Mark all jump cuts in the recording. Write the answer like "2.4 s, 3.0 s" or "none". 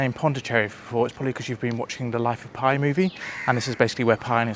none

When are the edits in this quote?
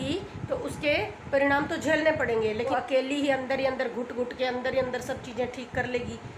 2.7 s

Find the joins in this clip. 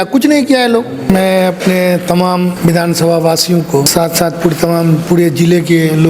1.1 s, 2.5 s, 3.9 s

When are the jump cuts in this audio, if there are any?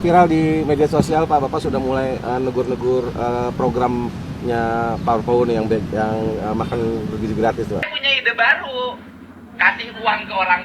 7.8 s

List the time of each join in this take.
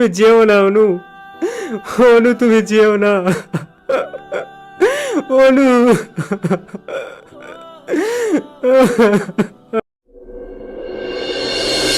9.8 s

